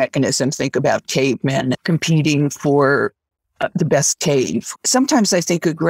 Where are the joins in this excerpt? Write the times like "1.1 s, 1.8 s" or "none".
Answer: 1.8 s, 4.7 s